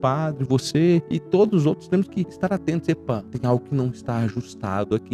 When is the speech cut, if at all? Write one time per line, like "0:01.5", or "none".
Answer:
0:01.1
0:02.3
0:03.3